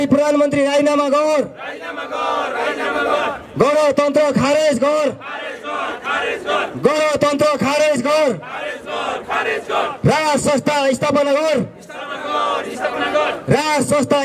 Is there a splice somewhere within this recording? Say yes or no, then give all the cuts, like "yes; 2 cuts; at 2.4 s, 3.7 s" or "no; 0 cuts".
no; 0 cuts